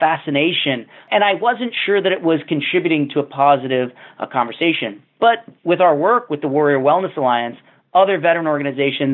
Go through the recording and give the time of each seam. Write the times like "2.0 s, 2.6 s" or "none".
1.0 s